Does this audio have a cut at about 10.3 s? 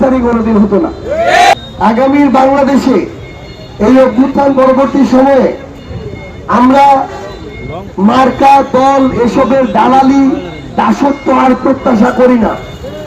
no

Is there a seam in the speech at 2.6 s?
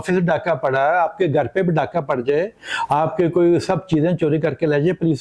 no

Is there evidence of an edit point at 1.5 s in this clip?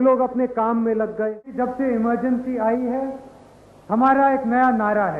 yes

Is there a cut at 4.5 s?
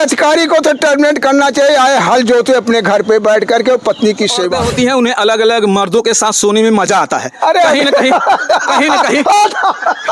yes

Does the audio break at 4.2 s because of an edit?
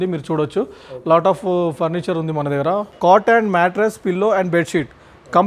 no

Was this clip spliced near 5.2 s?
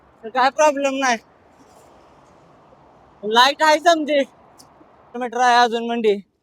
yes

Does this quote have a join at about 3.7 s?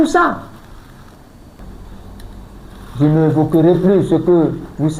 no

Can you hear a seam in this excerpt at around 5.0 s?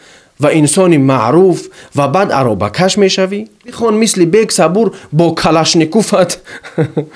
no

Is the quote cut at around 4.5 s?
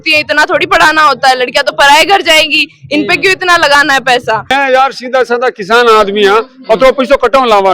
yes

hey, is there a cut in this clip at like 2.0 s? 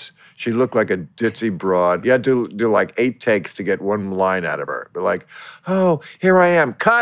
yes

